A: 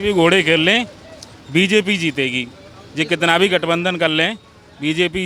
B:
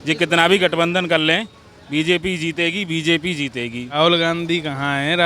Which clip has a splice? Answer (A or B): B